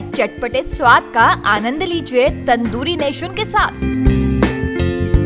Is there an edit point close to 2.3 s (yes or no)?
no